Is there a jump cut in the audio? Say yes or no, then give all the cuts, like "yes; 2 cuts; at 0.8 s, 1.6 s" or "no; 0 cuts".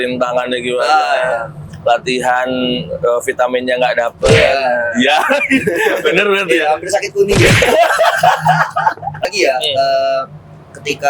yes; 1 cut; at 9.3 s